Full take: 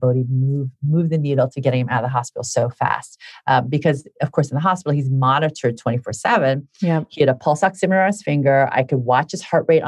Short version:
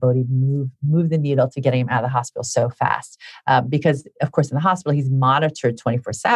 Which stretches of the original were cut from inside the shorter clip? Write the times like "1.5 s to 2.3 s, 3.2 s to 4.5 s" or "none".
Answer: none